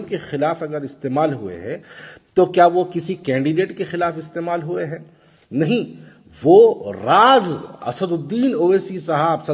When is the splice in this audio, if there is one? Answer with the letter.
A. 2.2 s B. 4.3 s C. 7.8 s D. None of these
D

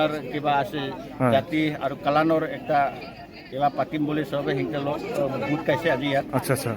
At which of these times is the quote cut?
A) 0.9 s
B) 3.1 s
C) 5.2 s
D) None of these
D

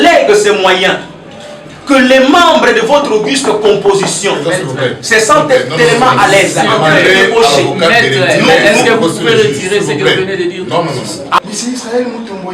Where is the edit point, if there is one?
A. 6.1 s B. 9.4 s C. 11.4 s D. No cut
C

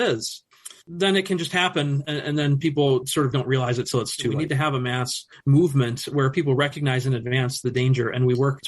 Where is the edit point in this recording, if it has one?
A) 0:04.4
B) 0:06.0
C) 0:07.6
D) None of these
A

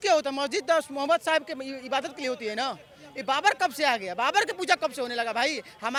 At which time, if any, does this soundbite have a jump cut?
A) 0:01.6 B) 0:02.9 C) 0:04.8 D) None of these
D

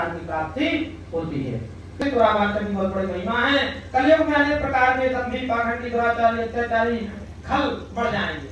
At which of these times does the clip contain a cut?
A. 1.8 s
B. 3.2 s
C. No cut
A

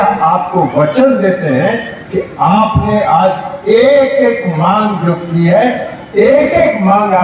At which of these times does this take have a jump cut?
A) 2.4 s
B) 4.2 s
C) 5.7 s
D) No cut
D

